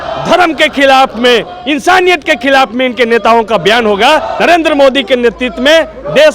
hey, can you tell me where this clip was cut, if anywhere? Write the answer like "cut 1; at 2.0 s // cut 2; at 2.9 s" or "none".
cut 1; at 4.3 s

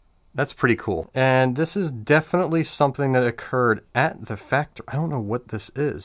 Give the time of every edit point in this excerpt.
cut 1; at 1.1 s

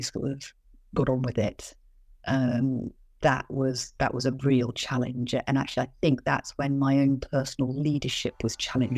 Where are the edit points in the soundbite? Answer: none

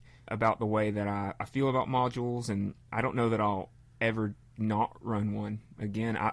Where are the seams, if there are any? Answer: none

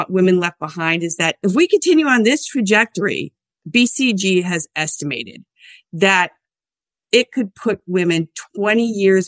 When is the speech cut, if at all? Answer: none

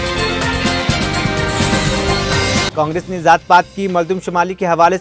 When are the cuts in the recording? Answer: cut 1; at 2.7 s

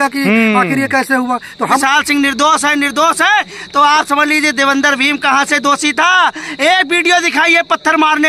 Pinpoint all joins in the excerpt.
cut 1; at 1.8 s

